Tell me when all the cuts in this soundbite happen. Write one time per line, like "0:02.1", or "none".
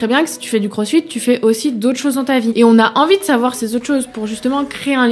0:02.5

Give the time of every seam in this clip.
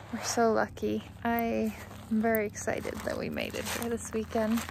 0:01.1
0:01.9

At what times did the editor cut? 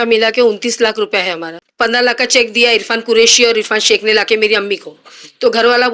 0:01.5

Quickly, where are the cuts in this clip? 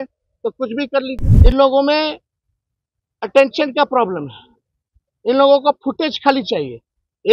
0:01.2

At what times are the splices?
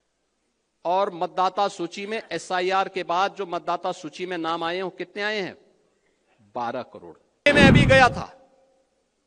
0:07.5

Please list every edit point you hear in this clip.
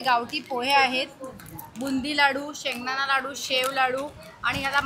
none

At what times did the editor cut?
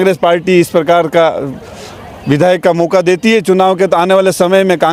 none

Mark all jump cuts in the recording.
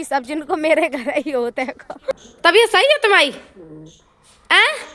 0:01.9

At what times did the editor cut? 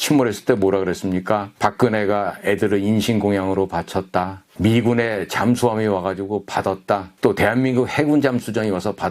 none

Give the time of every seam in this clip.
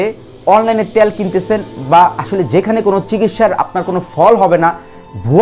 none

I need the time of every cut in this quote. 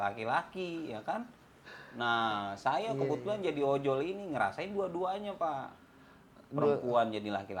none

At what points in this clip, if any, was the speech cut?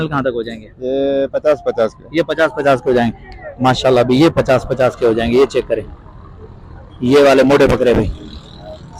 none

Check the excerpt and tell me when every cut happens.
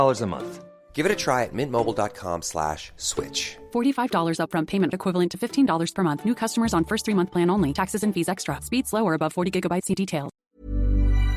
0:10.5

